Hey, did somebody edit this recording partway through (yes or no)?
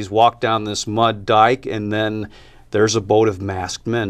no